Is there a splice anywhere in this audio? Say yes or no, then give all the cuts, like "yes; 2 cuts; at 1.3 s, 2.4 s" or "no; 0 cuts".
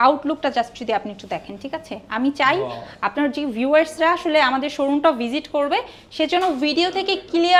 no; 0 cuts